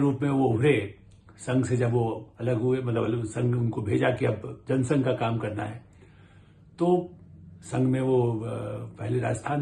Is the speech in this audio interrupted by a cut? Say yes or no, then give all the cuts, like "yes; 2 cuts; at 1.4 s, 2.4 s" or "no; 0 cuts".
no; 0 cuts